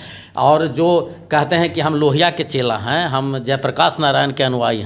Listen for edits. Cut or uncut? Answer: uncut